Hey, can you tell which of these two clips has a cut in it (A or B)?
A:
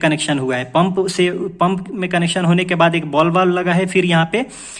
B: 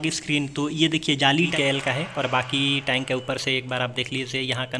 B